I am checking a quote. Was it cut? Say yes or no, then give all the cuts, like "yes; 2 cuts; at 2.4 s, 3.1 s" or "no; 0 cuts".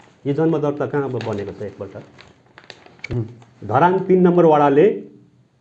yes; 1 cut; at 2.9 s